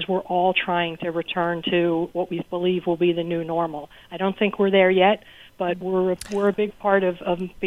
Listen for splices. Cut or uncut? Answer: uncut